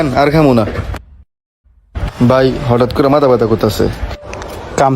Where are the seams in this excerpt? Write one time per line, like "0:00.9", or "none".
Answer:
0:02.0